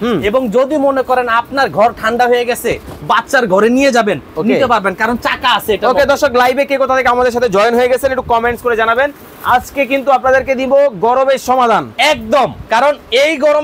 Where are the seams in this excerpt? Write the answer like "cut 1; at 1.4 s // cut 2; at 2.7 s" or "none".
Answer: none

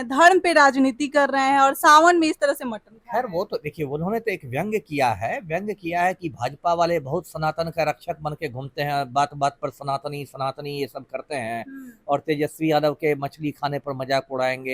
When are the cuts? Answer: none

